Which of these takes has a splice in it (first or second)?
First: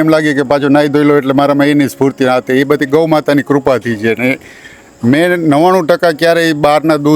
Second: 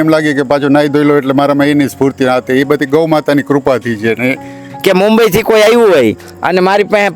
second